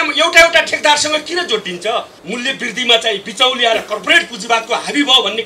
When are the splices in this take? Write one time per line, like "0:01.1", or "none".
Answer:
0:02.1

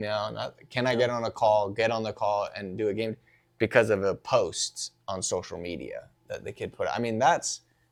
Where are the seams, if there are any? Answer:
none

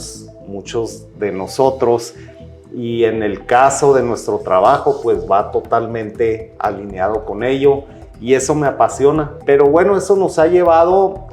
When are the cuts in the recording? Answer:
0:09.4

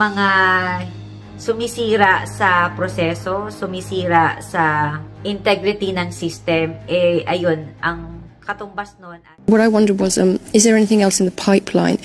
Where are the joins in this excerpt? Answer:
0:09.3

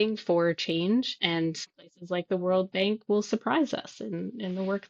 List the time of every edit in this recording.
none

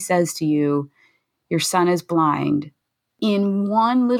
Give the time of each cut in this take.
0:03.1

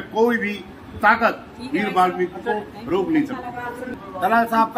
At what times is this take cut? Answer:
0:03.9

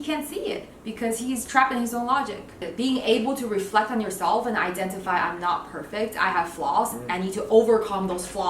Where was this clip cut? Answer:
0:02.6

